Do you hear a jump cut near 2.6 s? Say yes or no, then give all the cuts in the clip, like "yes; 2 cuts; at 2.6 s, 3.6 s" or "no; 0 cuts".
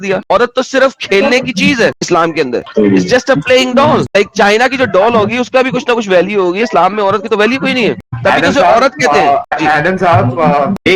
no; 0 cuts